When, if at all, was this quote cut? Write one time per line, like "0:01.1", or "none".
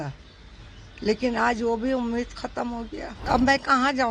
0:03.1